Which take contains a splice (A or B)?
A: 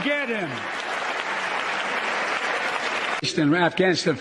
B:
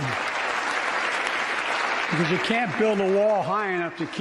A